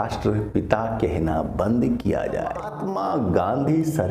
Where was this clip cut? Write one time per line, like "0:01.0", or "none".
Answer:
0:02.7

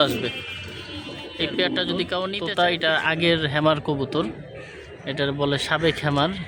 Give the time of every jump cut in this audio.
0:02.4

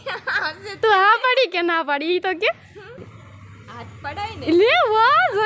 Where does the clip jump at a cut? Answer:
0:03.0

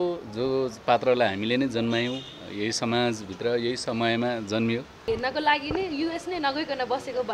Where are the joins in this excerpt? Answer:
0:05.1

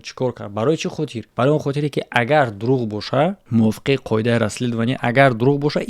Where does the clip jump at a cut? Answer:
0:01.2
0:03.4

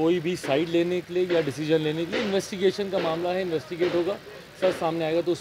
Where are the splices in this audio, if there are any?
0:01.6
0:02.8

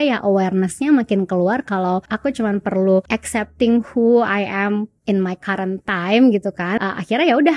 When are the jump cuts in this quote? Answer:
0:02.1
0:03.1
0:06.7

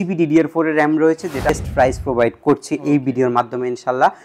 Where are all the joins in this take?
0:01.5

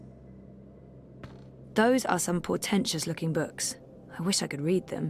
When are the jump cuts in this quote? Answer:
0:01.7

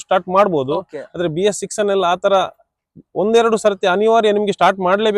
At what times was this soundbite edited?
none

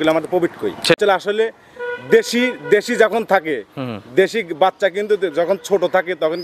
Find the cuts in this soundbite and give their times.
0:01.0

